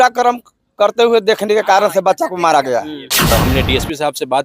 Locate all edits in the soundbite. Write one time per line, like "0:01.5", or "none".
0:03.3